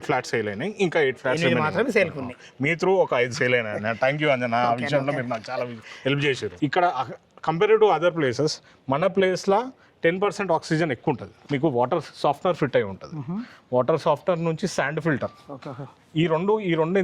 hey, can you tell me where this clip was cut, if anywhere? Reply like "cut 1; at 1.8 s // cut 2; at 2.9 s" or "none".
cut 1; at 6.5 s // cut 2; at 11.3 s